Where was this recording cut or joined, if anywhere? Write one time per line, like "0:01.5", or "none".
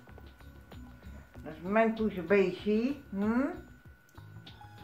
none